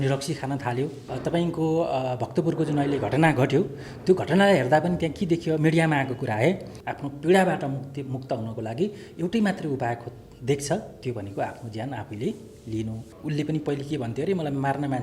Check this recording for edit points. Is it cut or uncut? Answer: cut